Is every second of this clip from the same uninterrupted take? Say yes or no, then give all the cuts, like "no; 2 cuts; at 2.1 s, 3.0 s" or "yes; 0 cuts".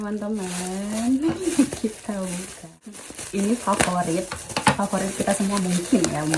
no; 1 cut; at 2.9 s